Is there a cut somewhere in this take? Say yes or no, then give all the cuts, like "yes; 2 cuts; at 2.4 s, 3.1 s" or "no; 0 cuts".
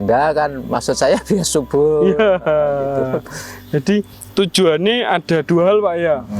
no; 0 cuts